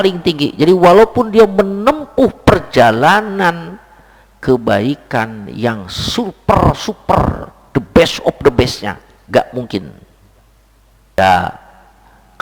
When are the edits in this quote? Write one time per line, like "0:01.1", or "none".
0:11.2

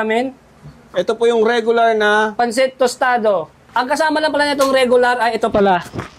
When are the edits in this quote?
0:03.6

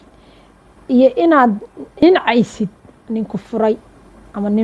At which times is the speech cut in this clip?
0:02.0

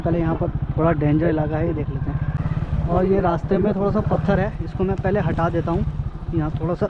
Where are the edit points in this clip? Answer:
0:02.4

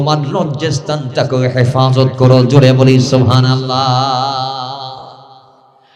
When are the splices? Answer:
none

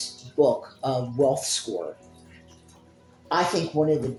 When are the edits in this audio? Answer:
none

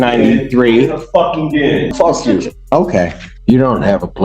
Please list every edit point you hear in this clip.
0:01.9
0:03.2

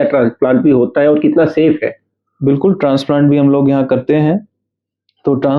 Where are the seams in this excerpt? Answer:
none

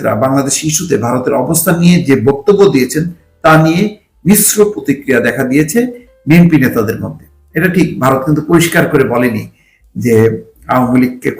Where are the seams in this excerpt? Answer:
none

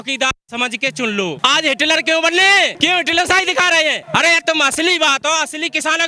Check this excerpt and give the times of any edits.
0:01.4
0:02.7
0:04.0

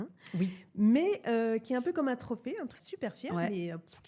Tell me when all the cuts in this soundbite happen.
0:02.7

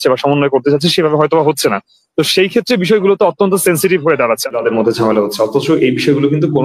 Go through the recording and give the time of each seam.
0:04.5

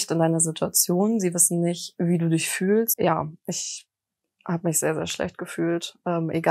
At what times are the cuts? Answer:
0:02.9

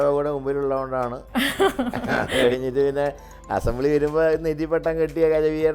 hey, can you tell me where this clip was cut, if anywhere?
0:01.2

